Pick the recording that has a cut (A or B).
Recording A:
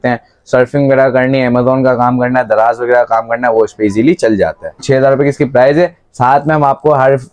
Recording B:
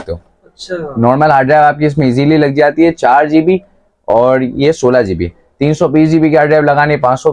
A